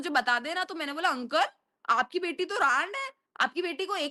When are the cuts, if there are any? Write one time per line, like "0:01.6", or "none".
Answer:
none